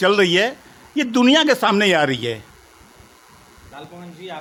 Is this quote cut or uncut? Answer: uncut